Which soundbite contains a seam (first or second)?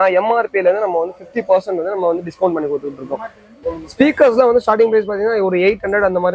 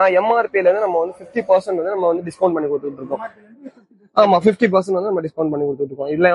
first